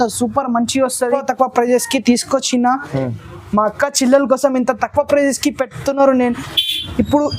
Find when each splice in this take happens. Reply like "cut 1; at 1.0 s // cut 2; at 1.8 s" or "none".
cut 1; at 0.9 s